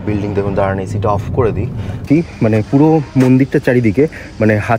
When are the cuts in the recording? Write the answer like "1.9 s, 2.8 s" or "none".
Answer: 2.0 s